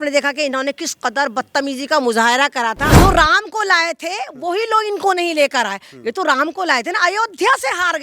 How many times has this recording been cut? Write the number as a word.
one